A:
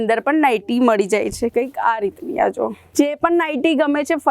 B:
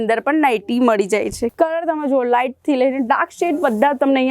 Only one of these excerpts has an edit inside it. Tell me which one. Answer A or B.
B